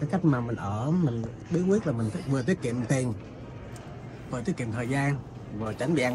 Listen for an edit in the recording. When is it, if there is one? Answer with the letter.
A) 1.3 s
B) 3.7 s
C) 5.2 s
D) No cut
D